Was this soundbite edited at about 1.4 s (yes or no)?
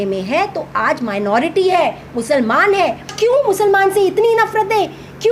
no